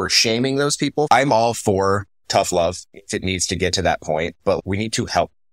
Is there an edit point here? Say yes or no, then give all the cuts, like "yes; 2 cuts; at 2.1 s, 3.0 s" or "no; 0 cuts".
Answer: yes; 3 cuts; at 1.1 s, 2.9 s, 4.6 s